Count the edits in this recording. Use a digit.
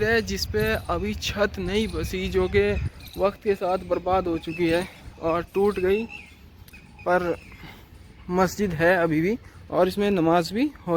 0